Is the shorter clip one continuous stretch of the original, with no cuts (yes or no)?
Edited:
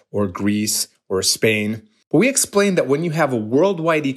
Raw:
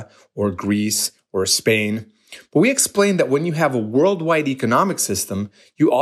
no